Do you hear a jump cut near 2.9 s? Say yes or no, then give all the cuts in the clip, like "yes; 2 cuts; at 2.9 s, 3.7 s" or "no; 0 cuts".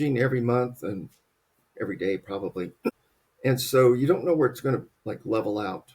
yes; 1 cut; at 2.9 s